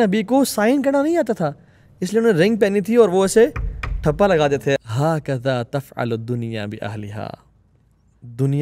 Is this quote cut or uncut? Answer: cut